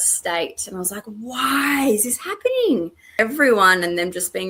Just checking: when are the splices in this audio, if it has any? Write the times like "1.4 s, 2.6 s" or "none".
3.1 s